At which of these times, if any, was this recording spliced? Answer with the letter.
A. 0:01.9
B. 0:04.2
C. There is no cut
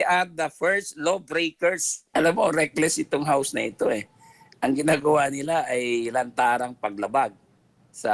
A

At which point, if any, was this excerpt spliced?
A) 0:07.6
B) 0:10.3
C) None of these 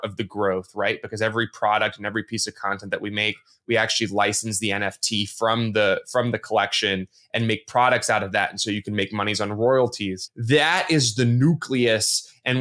B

